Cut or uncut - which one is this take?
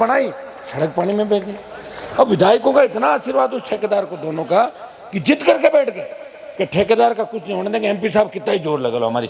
uncut